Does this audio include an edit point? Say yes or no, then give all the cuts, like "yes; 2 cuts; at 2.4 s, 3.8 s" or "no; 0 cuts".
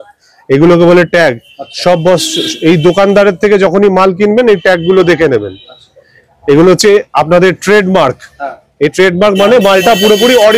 no; 0 cuts